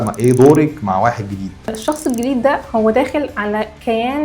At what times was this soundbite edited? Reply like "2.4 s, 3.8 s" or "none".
1.8 s